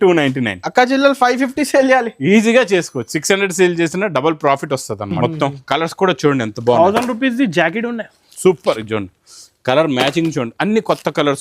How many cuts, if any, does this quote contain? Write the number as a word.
one